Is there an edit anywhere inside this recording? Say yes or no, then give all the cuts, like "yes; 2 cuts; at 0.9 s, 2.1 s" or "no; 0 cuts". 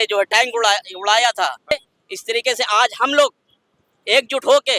yes; 1 cut; at 1.7 s